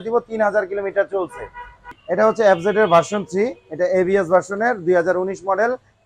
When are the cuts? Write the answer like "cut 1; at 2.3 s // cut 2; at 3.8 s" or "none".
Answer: cut 1; at 2.0 s

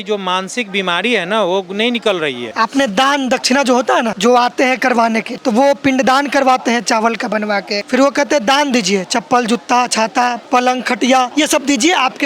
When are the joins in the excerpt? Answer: cut 1; at 2.4 s // cut 2; at 4.1 s // cut 3; at 5.3 s // cut 4; at 7.8 s // cut 5; at 10.4 s // cut 6; at 11.3 s

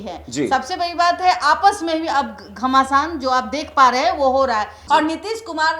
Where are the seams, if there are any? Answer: cut 1; at 4.8 s

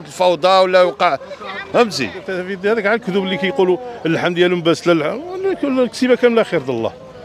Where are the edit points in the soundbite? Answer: cut 1; at 2.3 s

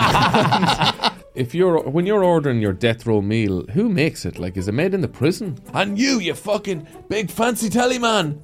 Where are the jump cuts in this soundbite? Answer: cut 1; at 1.3 s // cut 2; at 5.6 s

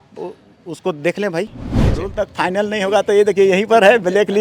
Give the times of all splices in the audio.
cut 1; at 1.9 s

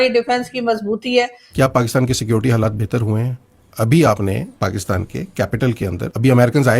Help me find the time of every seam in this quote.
cut 1; at 1.4 s

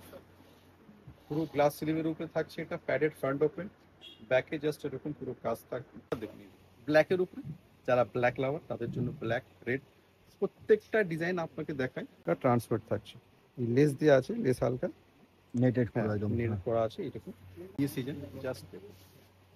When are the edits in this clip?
cut 1; at 6.1 s // cut 2; at 12.2 s // cut 3; at 17.8 s

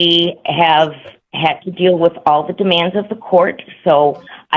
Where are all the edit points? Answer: none

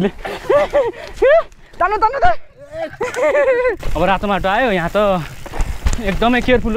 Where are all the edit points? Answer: cut 1; at 3.8 s

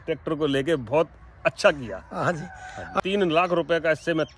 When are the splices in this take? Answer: cut 1; at 2.9 s

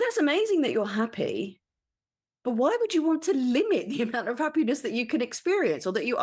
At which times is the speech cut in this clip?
none

